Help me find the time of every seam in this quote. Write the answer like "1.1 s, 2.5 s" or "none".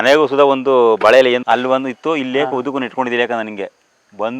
1.4 s

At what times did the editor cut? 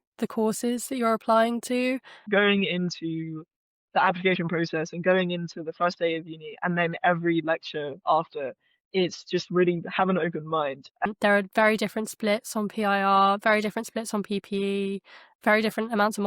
2.3 s, 11.1 s

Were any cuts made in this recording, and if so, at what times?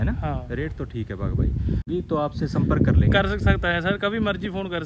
1.8 s

